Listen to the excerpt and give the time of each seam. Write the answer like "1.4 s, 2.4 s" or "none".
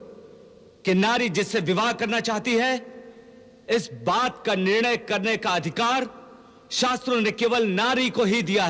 none